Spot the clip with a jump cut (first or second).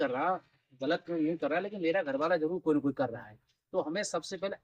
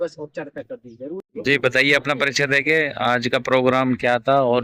second